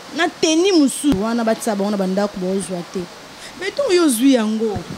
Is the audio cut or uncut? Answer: cut